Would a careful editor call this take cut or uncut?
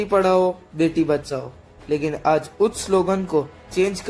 uncut